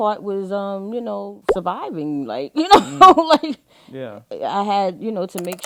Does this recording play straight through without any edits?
yes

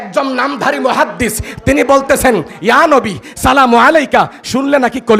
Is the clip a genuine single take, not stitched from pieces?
yes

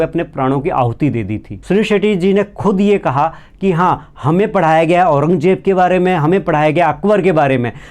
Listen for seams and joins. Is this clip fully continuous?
no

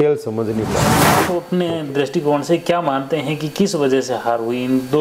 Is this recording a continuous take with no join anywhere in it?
no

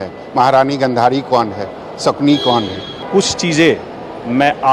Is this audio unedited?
no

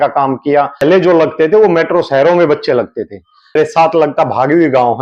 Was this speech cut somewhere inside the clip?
yes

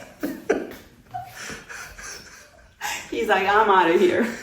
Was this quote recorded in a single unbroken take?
yes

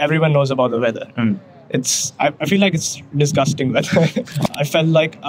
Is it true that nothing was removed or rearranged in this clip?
no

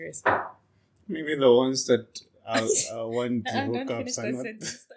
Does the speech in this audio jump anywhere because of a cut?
no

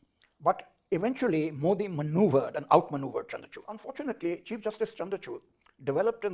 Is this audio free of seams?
no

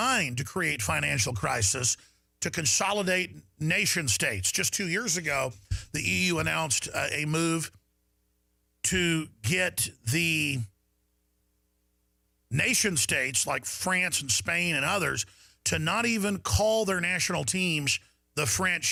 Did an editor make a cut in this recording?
no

